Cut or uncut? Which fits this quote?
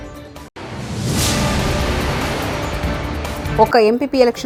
uncut